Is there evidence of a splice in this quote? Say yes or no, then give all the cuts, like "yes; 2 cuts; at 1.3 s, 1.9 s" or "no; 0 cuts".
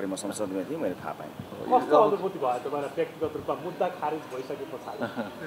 no; 0 cuts